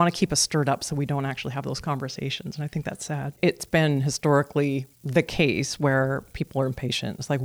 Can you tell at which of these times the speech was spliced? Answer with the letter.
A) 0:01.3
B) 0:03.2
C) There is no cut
B